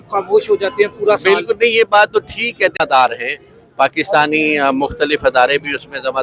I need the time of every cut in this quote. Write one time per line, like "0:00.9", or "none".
0:02.8